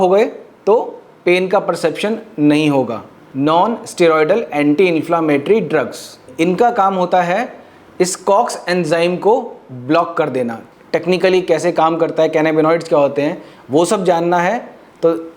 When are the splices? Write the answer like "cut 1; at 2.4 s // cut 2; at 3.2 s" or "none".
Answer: cut 1; at 3.2 s // cut 2; at 6.2 s // cut 3; at 10.7 s